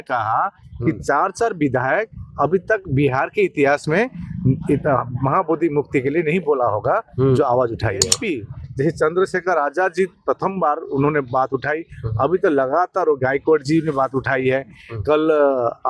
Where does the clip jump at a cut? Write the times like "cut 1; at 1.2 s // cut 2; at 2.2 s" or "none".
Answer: cut 1; at 8.2 s